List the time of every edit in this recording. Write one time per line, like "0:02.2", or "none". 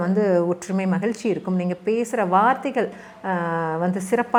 none